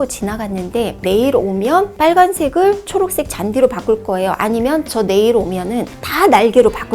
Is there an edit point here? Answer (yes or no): yes